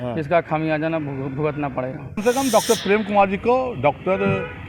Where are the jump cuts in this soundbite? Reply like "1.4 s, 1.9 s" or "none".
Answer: 2.2 s